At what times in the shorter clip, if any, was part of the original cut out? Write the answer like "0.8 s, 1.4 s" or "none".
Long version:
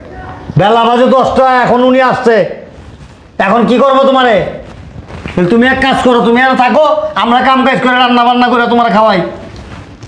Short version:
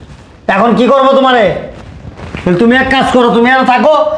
none